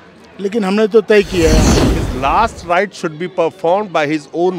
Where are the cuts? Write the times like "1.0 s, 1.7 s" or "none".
1.7 s